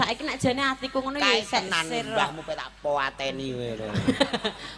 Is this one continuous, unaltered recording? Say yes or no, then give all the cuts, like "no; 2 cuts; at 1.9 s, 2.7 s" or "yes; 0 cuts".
yes; 0 cuts